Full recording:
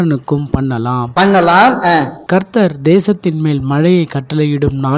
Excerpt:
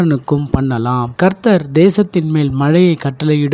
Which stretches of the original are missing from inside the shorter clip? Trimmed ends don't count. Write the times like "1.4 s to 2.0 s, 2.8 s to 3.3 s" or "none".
1.1 s to 2.2 s